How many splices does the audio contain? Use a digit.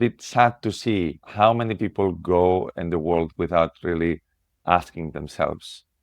1